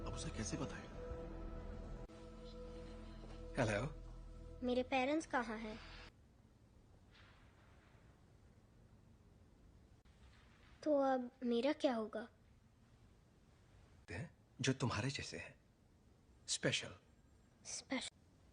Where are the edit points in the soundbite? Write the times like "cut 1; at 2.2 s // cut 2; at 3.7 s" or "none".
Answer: cut 1; at 6.1 s

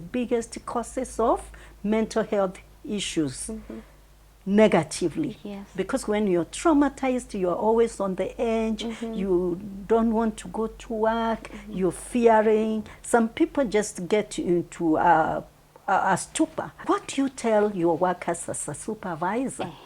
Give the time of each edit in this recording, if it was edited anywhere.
cut 1; at 16.7 s

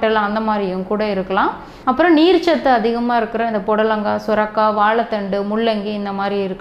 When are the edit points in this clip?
cut 1; at 1.7 s

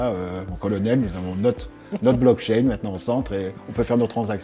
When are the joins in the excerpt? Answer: none

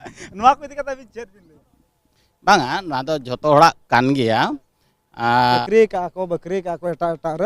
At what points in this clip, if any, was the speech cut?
cut 1; at 5.6 s

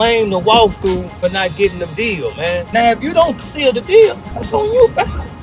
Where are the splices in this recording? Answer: cut 1; at 2.6 s // cut 2; at 4.3 s

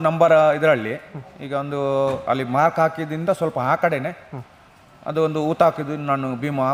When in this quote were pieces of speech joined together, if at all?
none

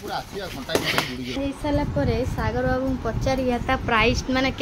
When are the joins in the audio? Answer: cut 1; at 1.4 s

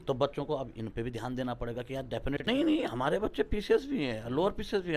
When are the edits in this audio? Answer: cut 1; at 2.4 s

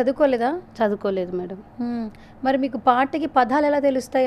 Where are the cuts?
none

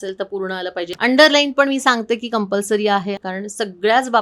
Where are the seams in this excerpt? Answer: cut 1; at 0.9 s // cut 2; at 3.2 s

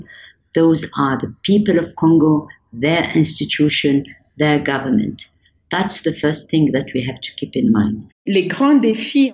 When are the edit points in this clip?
cut 1; at 8.1 s

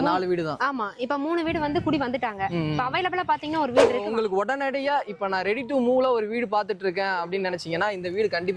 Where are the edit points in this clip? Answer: cut 1; at 4.0 s

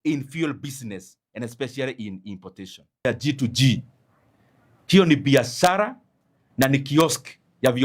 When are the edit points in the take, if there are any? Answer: cut 1; at 3.1 s

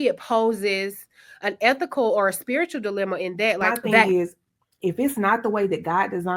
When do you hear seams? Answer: cut 1; at 3.7 s

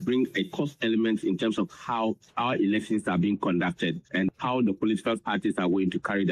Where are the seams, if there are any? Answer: cut 1; at 2.3 s // cut 2; at 4.3 s

